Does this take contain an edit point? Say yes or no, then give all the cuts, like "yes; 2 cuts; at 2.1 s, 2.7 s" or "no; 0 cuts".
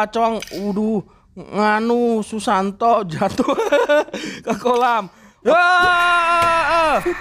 yes; 1 cut; at 5.4 s